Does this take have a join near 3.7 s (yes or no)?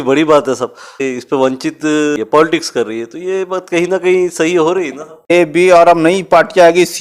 no